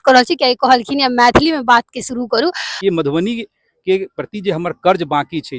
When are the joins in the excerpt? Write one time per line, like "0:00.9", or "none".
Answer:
0:02.7